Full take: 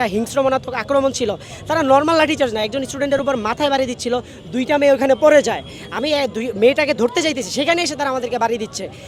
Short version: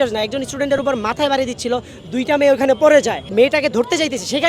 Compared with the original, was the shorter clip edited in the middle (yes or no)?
yes